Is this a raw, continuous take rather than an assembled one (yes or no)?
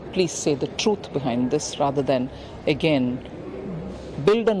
yes